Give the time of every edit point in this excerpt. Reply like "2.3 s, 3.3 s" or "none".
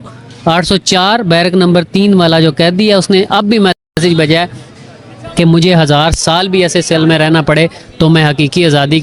none